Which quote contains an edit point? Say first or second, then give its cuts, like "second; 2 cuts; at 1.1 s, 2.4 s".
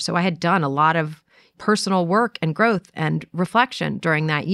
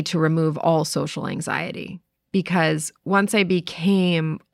first; 1 cut; at 1.5 s